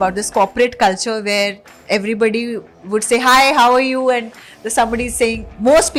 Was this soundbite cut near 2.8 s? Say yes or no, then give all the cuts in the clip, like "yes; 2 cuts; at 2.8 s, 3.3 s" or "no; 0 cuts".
no; 0 cuts